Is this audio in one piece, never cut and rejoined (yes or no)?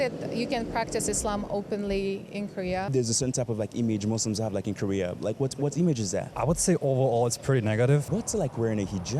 no